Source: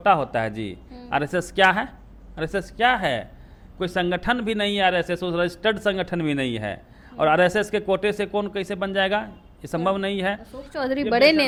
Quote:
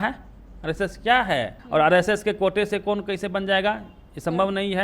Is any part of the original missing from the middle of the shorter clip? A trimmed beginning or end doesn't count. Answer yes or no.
yes